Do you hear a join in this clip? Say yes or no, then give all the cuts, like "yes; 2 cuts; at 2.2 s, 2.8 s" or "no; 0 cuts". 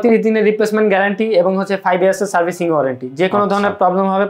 no; 0 cuts